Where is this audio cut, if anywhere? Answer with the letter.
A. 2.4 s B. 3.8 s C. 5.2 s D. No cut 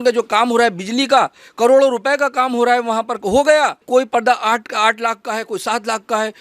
B